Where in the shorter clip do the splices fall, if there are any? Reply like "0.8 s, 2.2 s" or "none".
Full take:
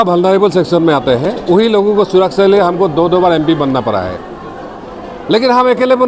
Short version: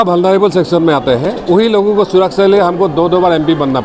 none